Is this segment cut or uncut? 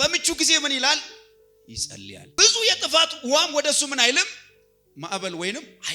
cut